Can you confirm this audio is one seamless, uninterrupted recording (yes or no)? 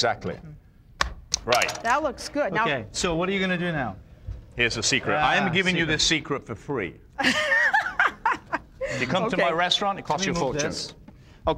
yes